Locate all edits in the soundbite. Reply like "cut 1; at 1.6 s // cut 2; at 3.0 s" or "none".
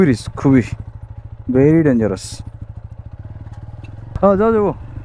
cut 1; at 4.1 s